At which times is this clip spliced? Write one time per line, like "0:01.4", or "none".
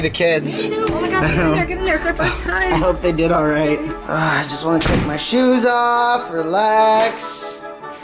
0:03.9